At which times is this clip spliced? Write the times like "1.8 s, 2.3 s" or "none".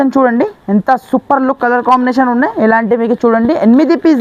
none